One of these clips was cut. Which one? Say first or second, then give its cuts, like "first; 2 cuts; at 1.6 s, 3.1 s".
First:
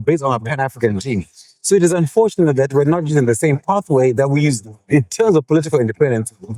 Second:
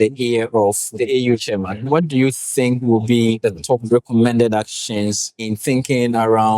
second; 4 cuts; at 1.0 s, 1.8 s, 3.5 s, 5.5 s